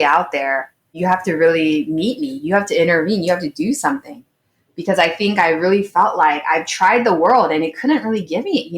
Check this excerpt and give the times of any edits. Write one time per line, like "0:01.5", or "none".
0:00.9